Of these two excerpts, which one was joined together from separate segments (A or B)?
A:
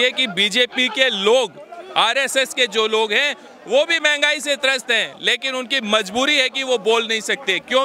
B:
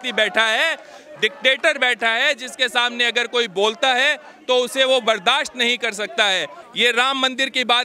B